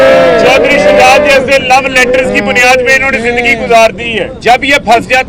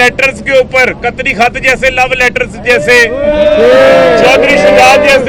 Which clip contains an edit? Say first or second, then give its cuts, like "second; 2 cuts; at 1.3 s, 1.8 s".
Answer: first; 1 cut; at 4.3 s